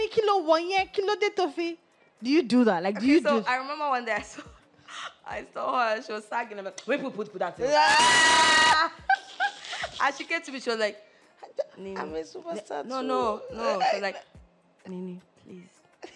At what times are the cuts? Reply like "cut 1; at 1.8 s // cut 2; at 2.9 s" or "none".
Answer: none